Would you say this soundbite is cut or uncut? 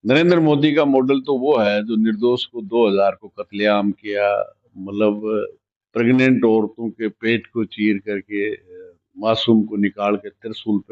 uncut